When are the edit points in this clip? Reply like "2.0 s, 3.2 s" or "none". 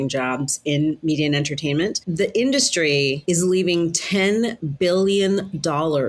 2.0 s